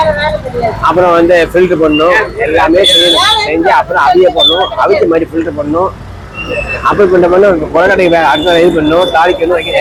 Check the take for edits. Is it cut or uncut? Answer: uncut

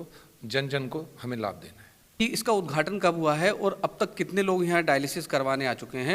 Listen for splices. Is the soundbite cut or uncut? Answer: cut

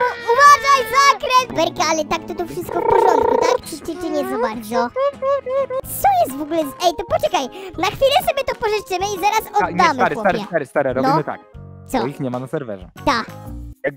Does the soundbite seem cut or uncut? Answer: cut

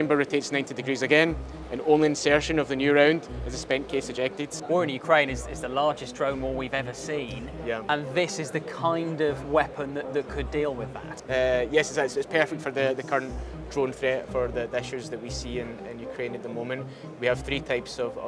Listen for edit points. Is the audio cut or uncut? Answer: cut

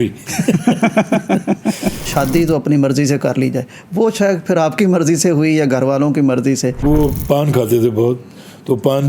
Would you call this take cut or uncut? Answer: cut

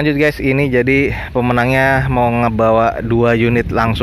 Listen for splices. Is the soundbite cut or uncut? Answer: uncut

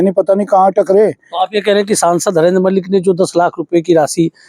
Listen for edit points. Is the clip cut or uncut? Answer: uncut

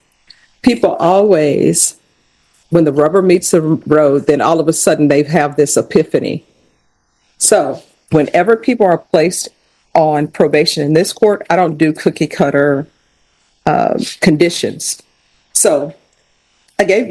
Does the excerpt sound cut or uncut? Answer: uncut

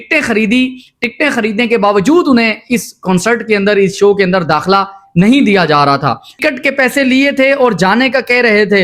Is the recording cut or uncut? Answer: cut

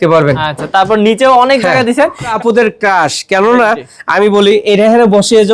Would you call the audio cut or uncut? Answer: cut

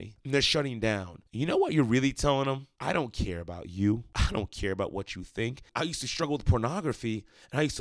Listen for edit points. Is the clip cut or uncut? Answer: cut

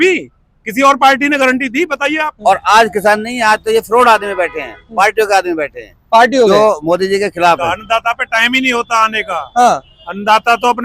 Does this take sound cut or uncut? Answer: cut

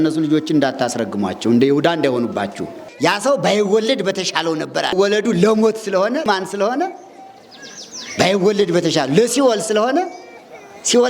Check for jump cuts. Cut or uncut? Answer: cut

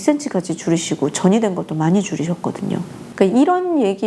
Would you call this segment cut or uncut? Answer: uncut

